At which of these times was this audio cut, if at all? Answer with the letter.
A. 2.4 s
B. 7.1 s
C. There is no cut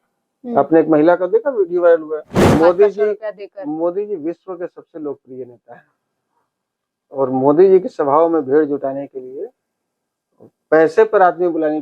A